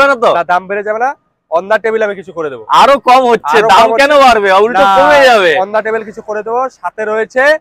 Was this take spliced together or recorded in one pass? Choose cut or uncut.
uncut